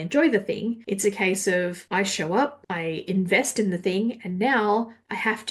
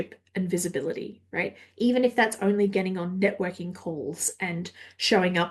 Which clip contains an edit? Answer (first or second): first